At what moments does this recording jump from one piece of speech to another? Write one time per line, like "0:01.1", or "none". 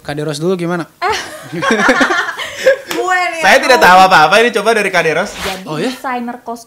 0:05.4